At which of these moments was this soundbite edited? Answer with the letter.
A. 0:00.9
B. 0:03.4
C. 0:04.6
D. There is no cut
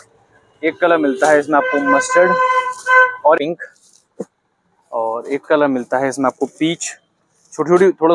B